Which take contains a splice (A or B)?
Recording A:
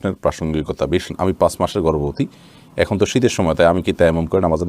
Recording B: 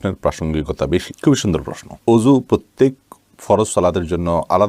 A